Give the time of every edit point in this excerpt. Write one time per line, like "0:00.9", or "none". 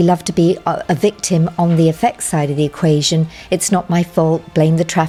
none